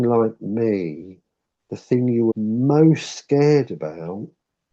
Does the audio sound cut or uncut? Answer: cut